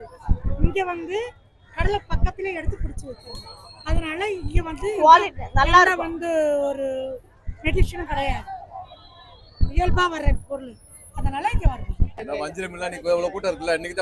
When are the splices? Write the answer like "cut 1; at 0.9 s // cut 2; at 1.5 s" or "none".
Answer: cut 1; at 12.2 s